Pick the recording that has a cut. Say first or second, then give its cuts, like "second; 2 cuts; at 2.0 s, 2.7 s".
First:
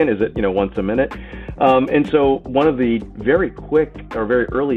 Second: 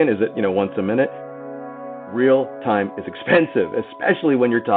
second; 1 cut; at 1.6 s